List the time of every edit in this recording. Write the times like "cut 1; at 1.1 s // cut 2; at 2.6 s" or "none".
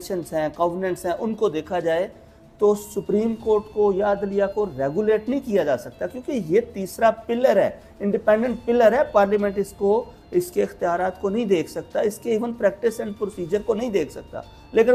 none